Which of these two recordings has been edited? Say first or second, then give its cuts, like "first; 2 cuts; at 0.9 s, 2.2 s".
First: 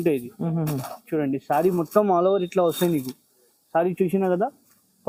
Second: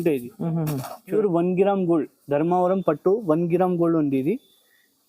second; 1 cut; at 1.1 s